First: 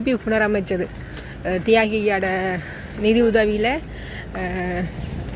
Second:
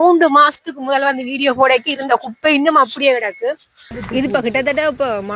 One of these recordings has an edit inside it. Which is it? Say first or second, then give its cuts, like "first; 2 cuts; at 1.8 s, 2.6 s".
second; 1 cut; at 3.8 s